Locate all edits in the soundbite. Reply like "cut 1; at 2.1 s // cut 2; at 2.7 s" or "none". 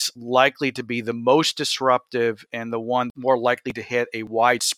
cut 1; at 3.1 s